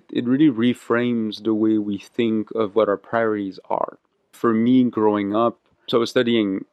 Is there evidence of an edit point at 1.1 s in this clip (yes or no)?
no